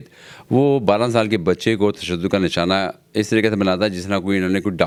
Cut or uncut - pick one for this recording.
uncut